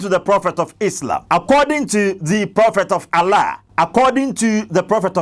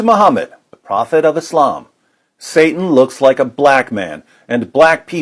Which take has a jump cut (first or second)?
first